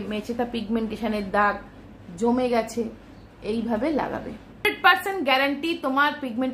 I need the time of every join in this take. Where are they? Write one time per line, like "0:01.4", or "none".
0:04.6